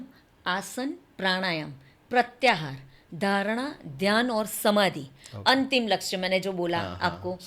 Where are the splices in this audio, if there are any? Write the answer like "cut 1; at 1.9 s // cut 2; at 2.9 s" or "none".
none